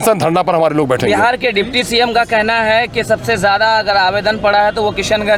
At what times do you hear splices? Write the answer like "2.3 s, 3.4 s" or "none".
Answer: none